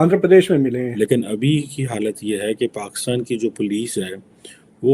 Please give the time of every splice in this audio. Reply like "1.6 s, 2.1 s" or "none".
0.9 s